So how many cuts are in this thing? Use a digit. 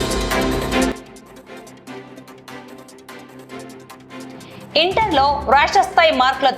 2